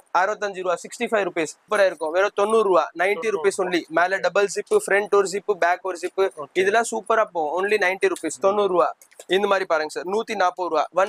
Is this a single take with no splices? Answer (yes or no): no